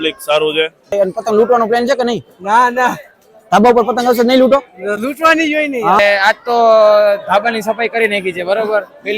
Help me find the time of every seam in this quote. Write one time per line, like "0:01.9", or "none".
0:00.9
0:06.0